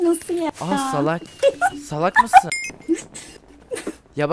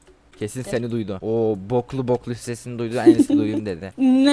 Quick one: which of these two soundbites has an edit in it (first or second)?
first